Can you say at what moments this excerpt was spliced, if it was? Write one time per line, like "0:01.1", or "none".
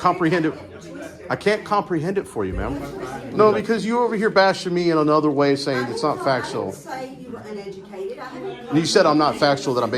0:03.1